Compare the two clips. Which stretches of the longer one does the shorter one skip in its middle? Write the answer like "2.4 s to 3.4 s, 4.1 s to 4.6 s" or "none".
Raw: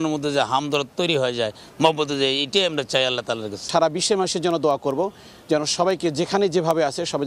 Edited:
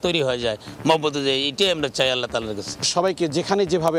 3.7 s to 5.6 s